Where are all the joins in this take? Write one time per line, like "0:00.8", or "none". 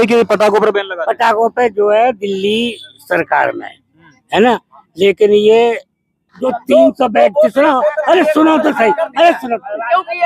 0:06.5